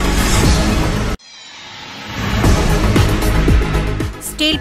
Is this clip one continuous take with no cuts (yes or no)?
yes